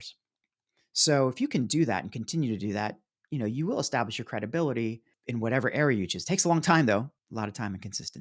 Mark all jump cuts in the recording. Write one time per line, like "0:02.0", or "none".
0:05.1
0:07.1